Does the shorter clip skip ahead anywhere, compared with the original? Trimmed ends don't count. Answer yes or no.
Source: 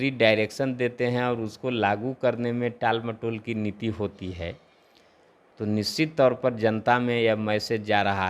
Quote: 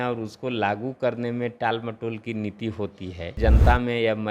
yes